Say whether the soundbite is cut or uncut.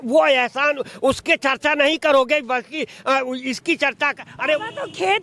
uncut